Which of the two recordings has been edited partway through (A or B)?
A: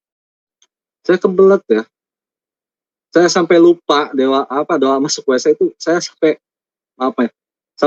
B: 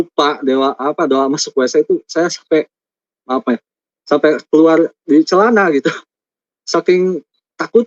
B